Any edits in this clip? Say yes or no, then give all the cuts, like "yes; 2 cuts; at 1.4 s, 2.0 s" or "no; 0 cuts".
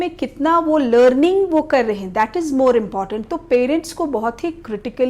no; 0 cuts